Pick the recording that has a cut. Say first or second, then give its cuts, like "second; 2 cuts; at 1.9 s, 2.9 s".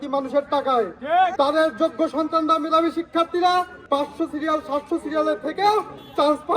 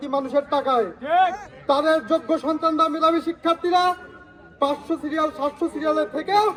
first; 2 cuts; at 1.3 s, 3.8 s